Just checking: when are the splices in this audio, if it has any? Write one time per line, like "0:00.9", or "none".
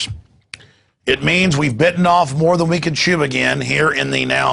0:02.0